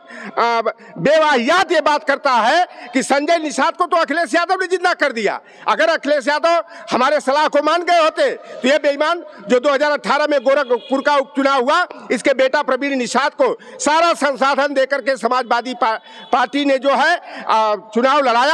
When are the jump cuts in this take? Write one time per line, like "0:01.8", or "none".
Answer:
none